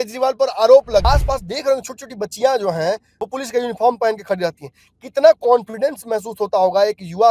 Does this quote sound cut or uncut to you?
cut